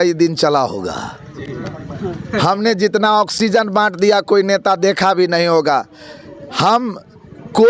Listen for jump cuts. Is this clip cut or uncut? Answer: uncut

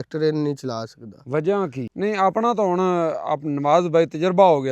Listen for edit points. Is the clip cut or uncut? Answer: cut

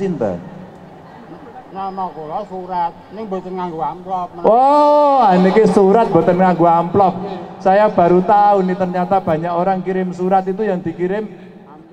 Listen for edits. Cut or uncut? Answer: uncut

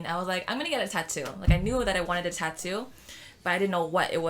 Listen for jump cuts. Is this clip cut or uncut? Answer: uncut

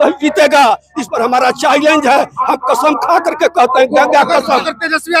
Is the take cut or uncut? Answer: uncut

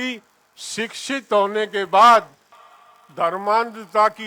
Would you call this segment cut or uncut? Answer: uncut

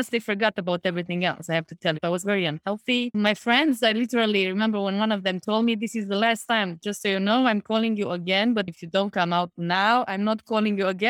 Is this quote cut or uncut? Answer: cut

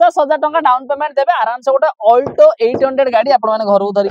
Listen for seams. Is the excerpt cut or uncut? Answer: uncut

